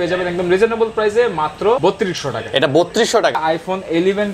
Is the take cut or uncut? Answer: cut